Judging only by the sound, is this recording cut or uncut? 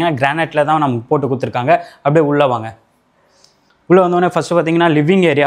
uncut